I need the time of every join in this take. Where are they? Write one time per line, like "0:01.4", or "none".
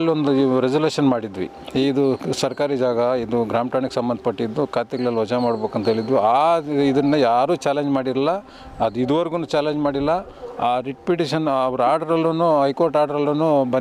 none

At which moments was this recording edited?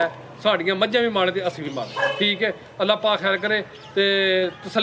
none

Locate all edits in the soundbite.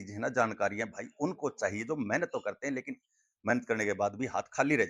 none

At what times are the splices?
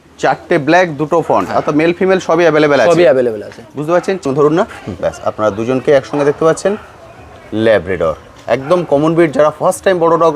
0:04.2

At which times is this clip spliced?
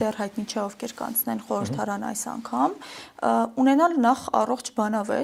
none

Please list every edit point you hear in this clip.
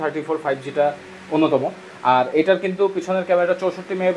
none

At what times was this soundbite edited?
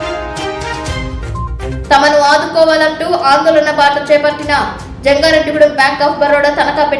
none

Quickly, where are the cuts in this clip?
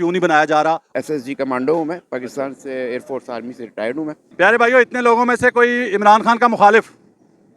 0:01.0
0:04.2

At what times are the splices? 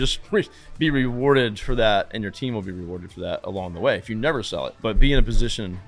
0:04.8

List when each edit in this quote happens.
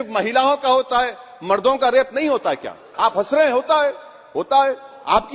0:02.9

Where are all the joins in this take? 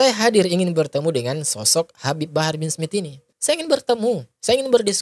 0:03.2

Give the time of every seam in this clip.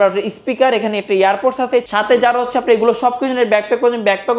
0:01.9

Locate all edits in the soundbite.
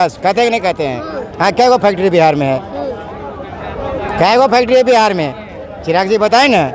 none

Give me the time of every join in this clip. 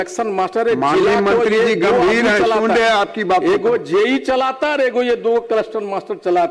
none

